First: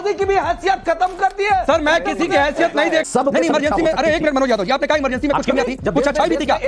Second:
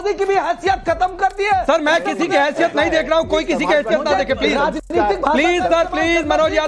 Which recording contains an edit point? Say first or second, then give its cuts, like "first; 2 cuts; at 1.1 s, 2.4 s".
first; 2 cuts; at 3.1 s, 5.8 s